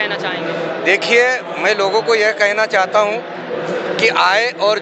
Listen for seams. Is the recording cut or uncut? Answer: uncut